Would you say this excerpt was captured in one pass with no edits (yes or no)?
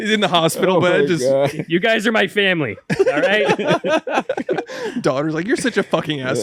yes